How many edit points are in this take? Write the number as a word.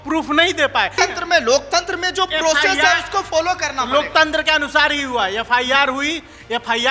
one